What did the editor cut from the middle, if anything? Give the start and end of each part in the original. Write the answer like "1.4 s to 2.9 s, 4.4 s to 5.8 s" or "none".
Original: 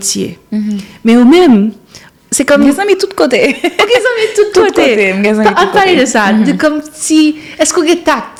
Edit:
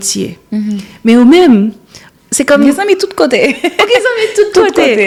none